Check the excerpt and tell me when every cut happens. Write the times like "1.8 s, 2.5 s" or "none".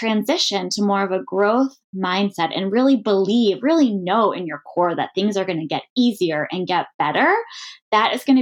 none

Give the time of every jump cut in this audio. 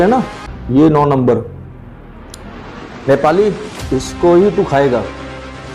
none

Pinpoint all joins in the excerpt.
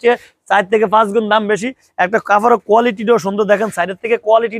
none

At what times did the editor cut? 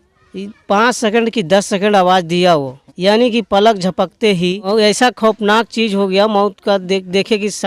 2.8 s, 4.7 s

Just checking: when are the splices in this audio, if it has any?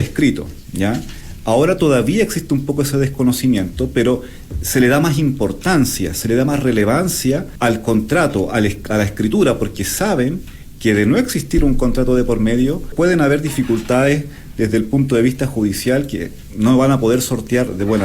7.5 s, 12.9 s

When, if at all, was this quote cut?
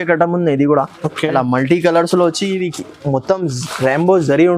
none

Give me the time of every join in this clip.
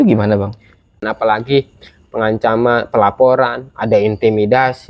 1.0 s

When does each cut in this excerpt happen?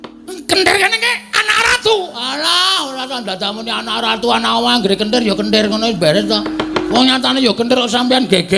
6.9 s

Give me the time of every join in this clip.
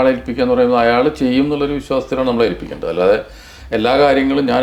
none

